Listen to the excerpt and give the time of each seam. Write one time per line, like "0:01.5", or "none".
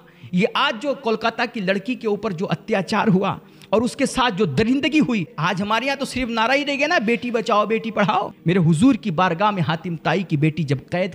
0:05.3
0:08.3